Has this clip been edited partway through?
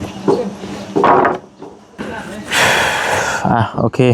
yes; 1 cut; at 2.0 s

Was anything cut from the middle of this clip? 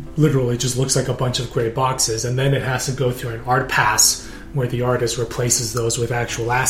no; 0 cuts

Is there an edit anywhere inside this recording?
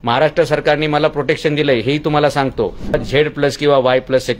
yes; 1 cut; at 2.9 s

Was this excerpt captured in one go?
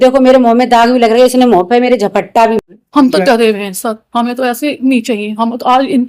no; 1 cut; at 2.6 s

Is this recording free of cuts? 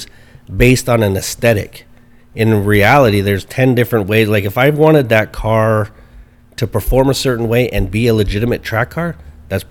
yes; 0 cuts

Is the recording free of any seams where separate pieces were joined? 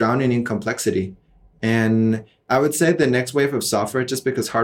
yes; 0 cuts

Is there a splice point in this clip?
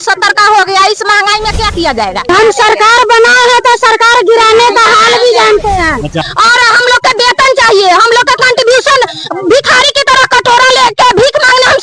yes; 2 cuts; at 2.3 s, 6.3 s

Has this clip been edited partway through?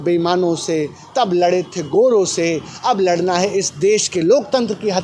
no; 0 cuts

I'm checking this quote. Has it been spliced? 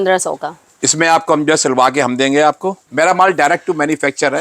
yes; 1 cut; at 2.8 s

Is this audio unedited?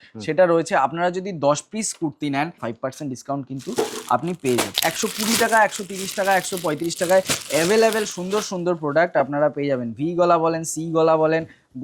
no; 2 cuts; at 2.6 s, 4.7 s

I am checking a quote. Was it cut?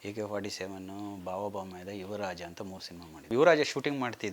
yes; 1 cut; at 3.3 s

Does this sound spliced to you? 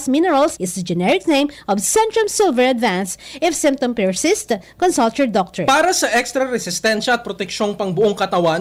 no; 0 cuts

